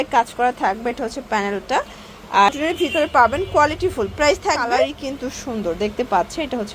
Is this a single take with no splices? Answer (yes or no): no